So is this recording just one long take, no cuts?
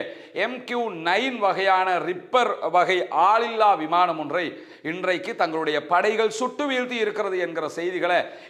yes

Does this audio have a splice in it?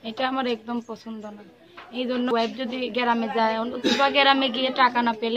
yes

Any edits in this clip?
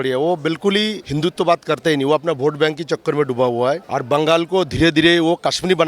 yes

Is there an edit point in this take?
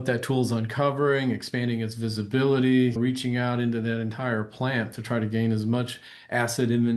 yes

